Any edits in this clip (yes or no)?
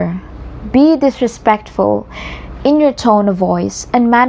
no